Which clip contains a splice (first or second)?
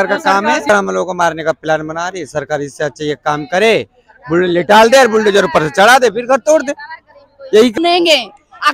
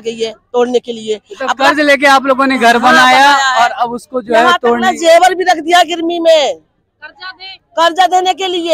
first